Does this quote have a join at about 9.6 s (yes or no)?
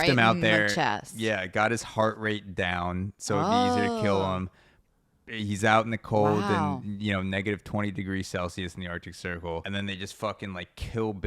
yes